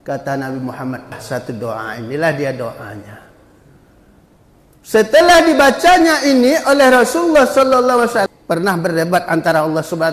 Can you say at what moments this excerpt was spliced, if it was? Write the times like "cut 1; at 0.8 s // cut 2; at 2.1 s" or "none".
cut 1; at 1.2 s // cut 2; at 8.3 s